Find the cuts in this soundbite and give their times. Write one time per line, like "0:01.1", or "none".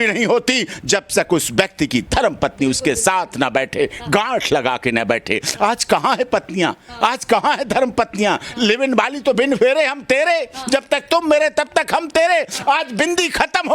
none